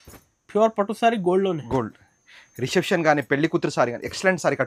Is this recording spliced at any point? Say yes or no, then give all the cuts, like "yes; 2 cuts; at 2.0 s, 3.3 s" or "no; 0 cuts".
no; 0 cuts